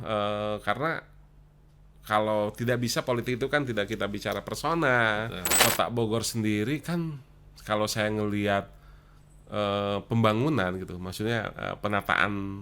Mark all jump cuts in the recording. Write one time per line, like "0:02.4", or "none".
0:05.5